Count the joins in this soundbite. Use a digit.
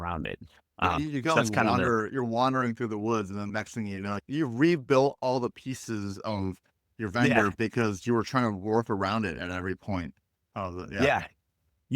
1